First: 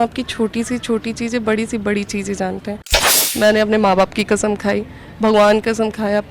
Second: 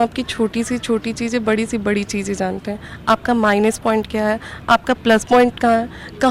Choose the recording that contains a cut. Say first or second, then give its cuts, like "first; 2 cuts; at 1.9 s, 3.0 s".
first; 1 cut; at 2.9 s